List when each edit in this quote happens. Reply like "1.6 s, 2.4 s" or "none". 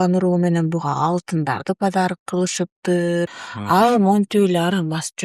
3.5 s